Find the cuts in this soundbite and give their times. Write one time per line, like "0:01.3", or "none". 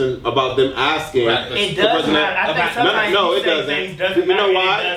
none